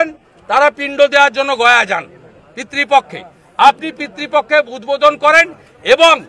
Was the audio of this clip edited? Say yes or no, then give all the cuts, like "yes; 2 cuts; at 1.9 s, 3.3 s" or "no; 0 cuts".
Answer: no; 0 cuts